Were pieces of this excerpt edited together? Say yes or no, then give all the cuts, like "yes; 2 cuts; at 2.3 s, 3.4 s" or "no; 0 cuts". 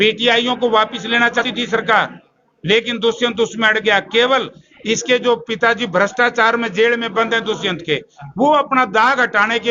yes; 1 cut; at 1.4 s